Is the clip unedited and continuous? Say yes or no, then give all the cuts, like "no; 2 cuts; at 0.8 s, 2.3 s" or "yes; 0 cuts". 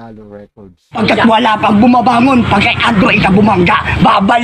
no; 1 cut; at 1.0 s